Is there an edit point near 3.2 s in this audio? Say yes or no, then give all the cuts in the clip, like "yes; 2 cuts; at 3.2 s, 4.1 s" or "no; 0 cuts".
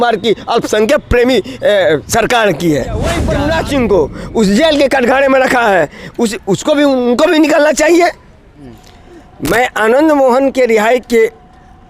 yes; 2 cuts; at 3.2 s, 8.3 s